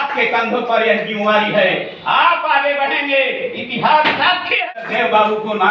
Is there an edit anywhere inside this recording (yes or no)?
yes